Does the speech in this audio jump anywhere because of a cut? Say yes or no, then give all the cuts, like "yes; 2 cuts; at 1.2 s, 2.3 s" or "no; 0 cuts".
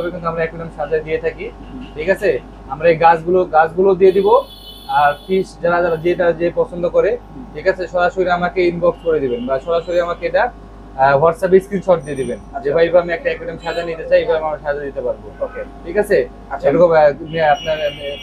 no; 0 cuts